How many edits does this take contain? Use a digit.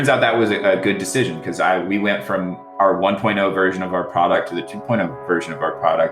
1